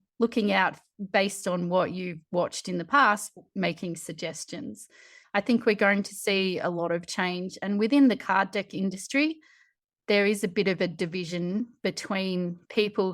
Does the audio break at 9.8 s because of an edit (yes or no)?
no